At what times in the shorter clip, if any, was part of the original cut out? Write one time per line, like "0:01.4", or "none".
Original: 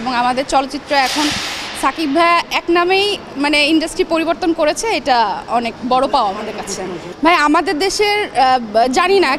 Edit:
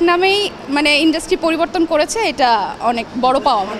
none